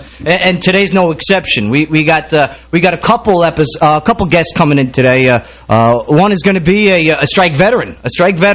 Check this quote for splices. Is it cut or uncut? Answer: uncut